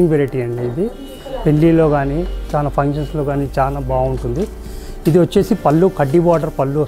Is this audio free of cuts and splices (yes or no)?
yes